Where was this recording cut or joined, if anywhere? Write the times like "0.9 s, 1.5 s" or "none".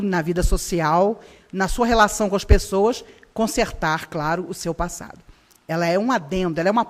4.8 s